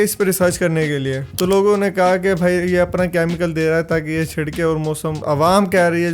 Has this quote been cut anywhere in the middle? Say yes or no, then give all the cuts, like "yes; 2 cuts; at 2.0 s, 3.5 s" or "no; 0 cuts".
yes; 2 cuts; at 1.3 s, 5.2 s